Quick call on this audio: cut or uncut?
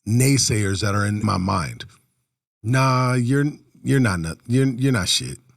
cut